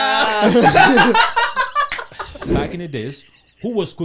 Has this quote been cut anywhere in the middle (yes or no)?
yes